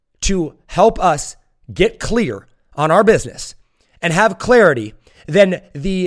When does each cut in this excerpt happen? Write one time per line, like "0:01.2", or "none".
none